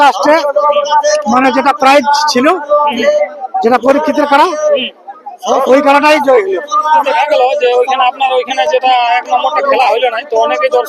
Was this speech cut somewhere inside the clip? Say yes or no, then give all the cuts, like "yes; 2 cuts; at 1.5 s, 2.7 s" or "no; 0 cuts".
yes; 1 cut; at 7.0 s